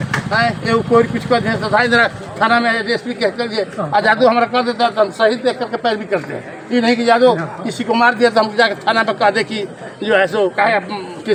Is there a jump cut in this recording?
no; 0 cuts

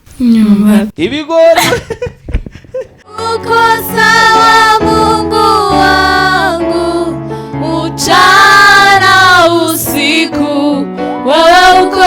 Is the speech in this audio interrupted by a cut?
yes; 1 cut; at 3.2 s

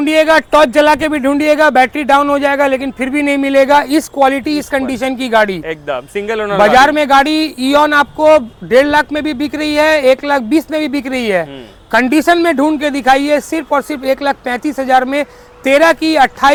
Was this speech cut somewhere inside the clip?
no; 0 cuts

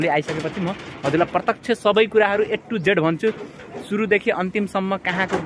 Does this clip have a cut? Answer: no; 0 cuts

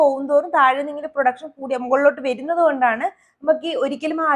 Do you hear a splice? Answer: no; 0 cuts

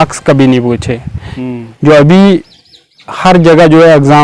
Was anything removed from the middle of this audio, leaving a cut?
no; 0 cuts

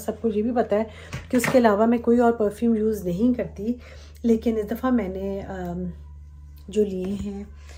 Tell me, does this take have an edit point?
no; 0 cuts

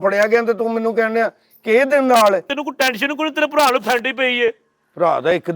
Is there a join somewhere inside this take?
yes; 1 cut; at 2.5 s

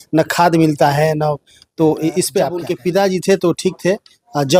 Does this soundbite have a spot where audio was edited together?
yes; 1 cut; at 2.7 s

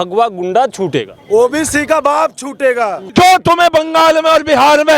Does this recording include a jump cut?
yes; 1 cut; at 3.0 s

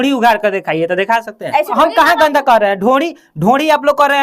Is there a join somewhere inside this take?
yes; 1 cut; at 1.7 s

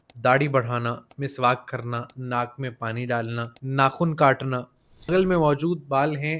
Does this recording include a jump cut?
yes; 2 cuts; at 3.6 s, 5.1 s

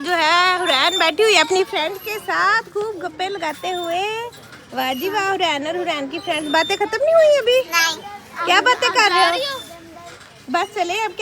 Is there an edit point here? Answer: no; 0 cuts

